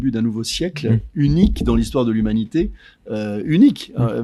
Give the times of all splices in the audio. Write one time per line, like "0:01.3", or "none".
none